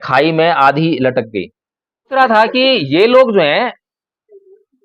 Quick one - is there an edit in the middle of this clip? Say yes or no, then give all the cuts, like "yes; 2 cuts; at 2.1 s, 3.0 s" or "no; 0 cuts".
yes; 1 cut; at 2.2 s